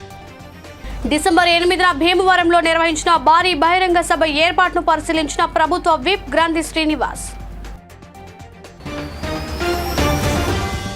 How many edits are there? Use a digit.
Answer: 1